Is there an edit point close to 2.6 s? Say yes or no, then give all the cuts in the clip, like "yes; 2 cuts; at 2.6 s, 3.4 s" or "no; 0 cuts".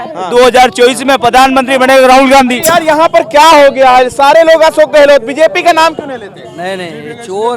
yes; 1 cut; at 2.6 s